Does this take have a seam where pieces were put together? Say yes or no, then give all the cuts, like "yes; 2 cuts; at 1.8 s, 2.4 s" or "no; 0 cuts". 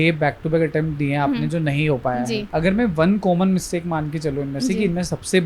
yes; 1 cut; at 2.4 s